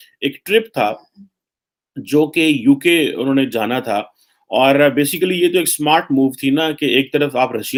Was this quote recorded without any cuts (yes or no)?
yes